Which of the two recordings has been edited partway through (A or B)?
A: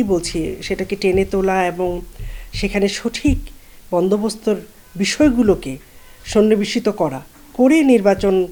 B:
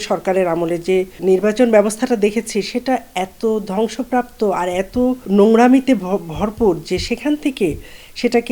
B